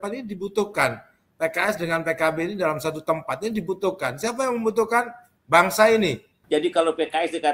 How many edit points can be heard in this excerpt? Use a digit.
1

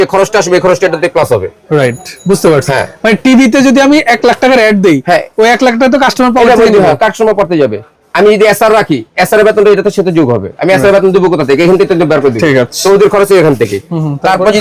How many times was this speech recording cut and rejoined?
0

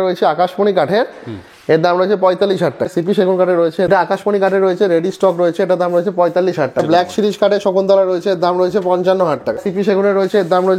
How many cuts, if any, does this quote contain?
4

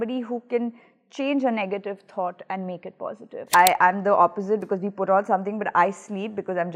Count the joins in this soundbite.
1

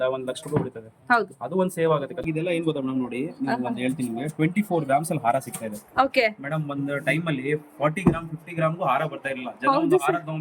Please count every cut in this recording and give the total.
1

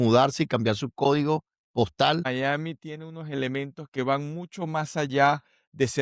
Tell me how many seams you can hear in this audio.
1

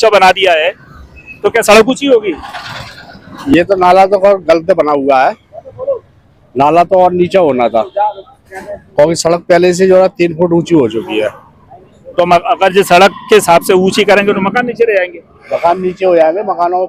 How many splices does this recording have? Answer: 0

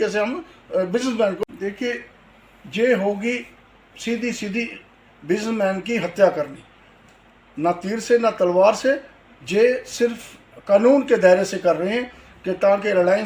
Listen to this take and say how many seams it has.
1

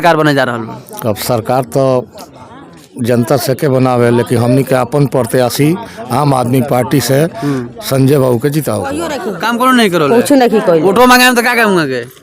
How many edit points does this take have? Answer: 1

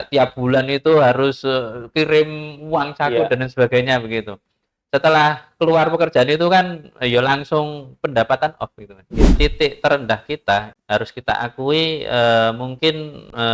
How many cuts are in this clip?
2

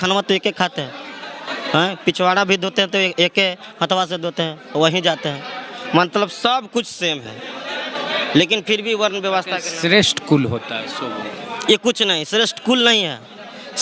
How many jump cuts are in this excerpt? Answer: 0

